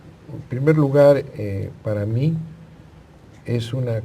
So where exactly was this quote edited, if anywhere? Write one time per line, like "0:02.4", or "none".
0:02.6